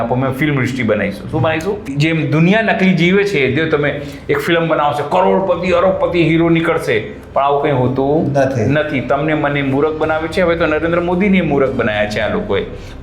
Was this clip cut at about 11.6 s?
no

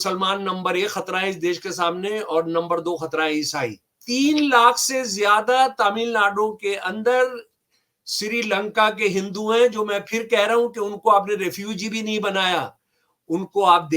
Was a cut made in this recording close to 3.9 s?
yes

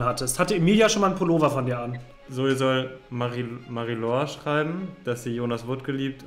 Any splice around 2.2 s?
yes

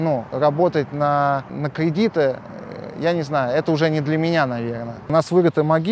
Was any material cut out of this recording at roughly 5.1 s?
yes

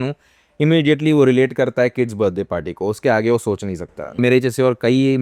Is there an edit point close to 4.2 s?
yes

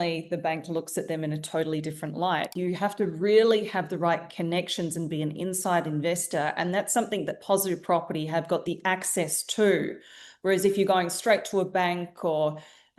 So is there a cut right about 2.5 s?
yes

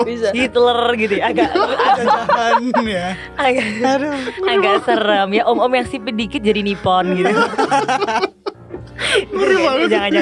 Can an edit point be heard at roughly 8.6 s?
no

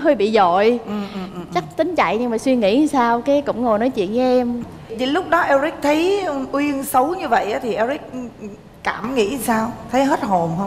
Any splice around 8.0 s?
no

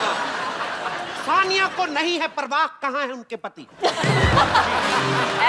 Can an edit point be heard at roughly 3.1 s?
no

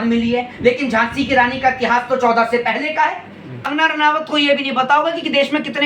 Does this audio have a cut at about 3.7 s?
yes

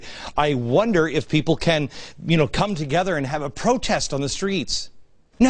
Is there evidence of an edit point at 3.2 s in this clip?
no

